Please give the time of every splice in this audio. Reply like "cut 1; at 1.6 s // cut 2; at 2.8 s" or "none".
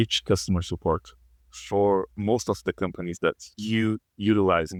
none

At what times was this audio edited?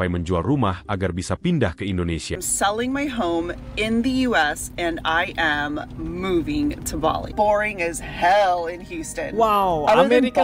cut 1; at 2.5 s // cut 2; at 7.3 s

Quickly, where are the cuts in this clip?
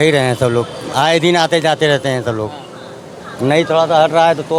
none

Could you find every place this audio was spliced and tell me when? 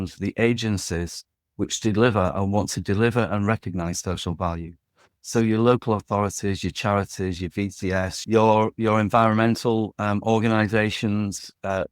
cut 1; at 8.2 s

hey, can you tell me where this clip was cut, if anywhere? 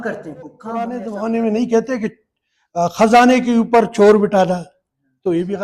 cut 1; at 1.0 s

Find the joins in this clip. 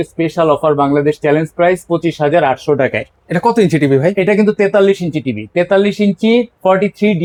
none

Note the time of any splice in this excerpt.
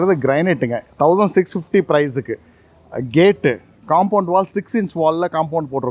none

